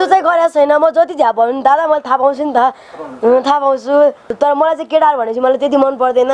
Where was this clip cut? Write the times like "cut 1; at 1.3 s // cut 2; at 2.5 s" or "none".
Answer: cut 1; at 4.3 s